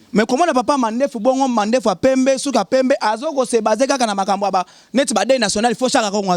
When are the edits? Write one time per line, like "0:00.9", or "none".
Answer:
none